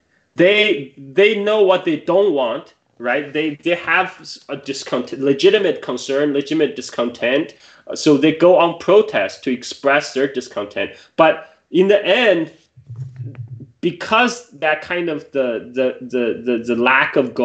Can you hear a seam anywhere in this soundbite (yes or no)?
no